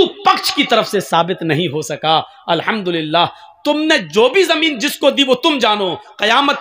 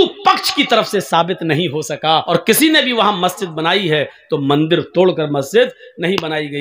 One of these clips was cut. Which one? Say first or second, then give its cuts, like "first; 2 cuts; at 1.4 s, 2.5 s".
second; 1 cut; at 2.3 s